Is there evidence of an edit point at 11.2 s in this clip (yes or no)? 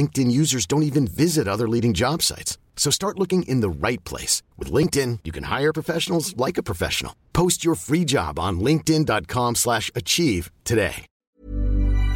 yes